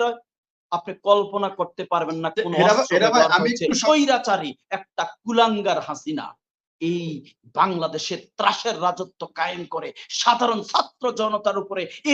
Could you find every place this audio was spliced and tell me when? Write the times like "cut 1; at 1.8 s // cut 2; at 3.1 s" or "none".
cut 1; at 3.8 s